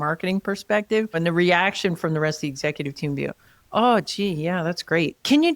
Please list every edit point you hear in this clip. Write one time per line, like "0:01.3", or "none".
0:01.1

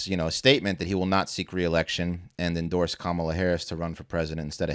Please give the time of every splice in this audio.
none

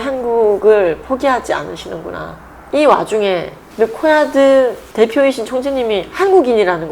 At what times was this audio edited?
0:02.6

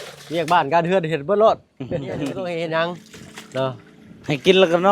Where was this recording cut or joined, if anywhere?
0:02.3

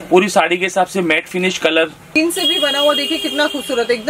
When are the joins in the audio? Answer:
0:02.1

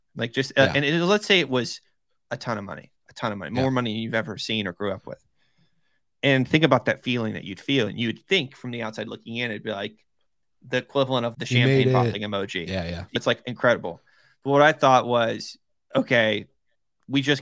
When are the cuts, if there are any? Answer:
0:11.3
0:13.2

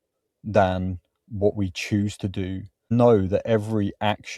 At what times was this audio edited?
0:02.9

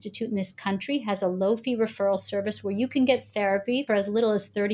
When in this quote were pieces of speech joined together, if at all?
0:03.8

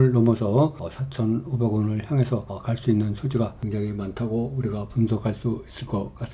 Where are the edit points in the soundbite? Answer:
none

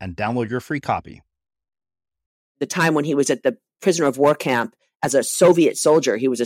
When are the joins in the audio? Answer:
0:02.6

